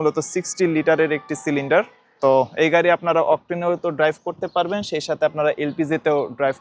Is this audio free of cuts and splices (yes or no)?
no